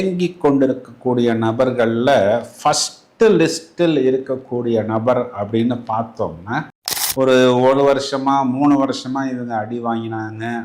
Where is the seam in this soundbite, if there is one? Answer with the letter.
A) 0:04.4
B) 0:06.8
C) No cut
B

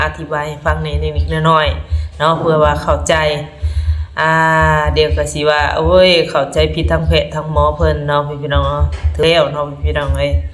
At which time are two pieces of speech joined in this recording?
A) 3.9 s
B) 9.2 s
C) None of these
B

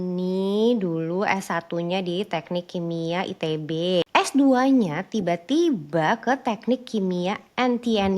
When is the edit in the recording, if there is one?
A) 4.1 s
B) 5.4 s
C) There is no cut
A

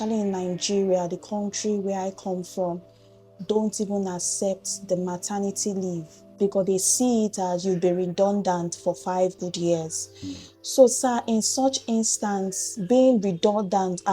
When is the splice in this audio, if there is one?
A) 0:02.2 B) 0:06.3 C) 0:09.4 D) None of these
B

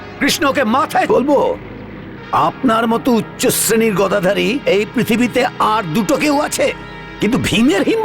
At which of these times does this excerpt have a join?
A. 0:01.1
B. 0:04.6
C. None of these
A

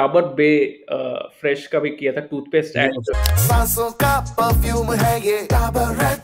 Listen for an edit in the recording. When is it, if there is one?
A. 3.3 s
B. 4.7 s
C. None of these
A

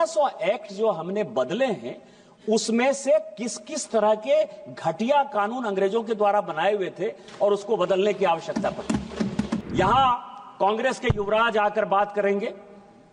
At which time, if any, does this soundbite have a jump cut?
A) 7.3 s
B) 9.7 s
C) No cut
B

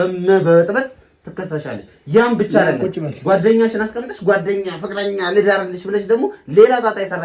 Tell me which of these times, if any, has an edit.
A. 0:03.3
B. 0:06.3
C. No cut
C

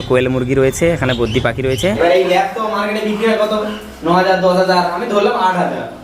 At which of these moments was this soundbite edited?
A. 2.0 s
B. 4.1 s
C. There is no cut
A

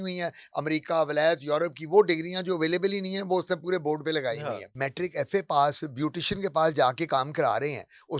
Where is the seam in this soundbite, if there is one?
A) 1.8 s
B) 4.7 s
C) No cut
B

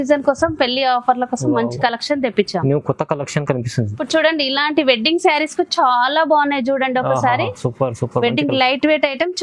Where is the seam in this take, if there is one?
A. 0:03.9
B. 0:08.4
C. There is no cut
A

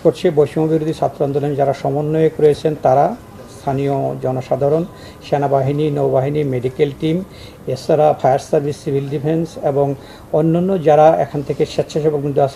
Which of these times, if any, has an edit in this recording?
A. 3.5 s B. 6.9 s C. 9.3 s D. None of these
D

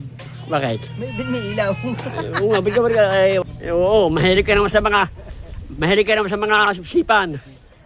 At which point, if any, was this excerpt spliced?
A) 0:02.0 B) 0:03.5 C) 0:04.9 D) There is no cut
B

